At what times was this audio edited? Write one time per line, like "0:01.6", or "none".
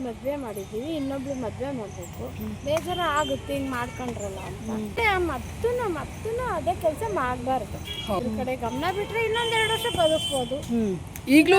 0:05.0
0:08.2

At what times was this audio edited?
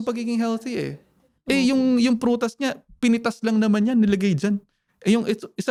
none

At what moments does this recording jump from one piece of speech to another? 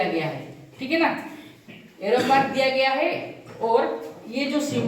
none

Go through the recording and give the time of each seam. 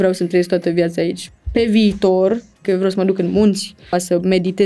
0:01.2
0:02.6
0:03.9

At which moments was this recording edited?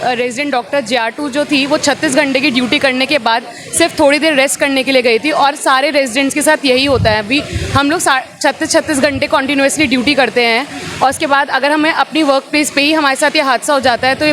none

